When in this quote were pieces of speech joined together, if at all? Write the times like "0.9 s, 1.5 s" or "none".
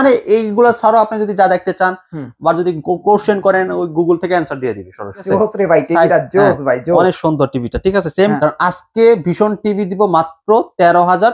5.2 s, 8.4 s